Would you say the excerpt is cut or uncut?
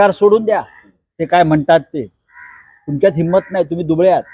uncut